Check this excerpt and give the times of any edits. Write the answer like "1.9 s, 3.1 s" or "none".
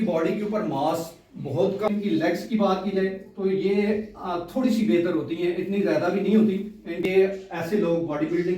1.9 s, 7.1 s

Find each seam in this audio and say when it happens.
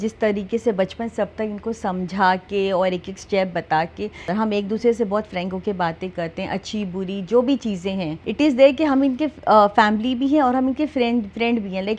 4.3 s, 8.2 s

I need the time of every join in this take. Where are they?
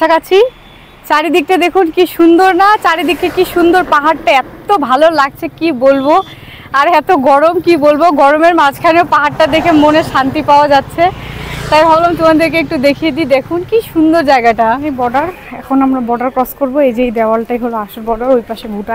14.9 s

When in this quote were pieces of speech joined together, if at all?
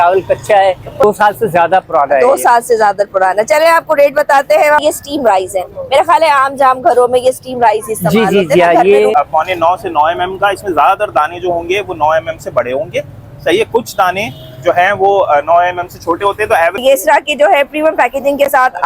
1.0 s, 4.8 s, 9.1 s, 16.8 s

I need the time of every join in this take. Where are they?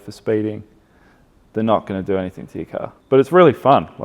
2.9 s

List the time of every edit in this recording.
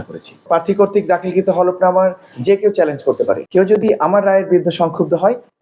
3.4 s

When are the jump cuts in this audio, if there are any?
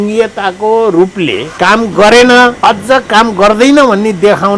1.4 s, 2.6 s

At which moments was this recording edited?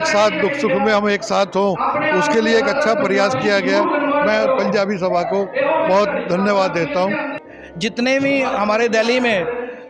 7.4 s

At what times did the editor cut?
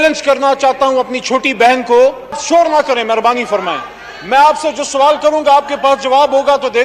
2.4 s

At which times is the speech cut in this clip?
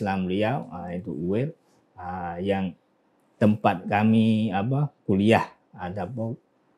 none

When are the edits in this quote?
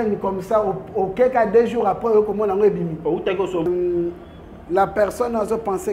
3.7 s

